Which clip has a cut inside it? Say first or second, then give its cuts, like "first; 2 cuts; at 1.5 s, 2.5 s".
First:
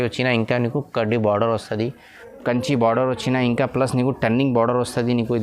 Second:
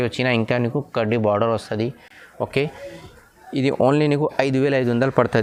first; 1 cut; at 2.2 s